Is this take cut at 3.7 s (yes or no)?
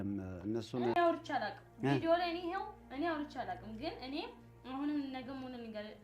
no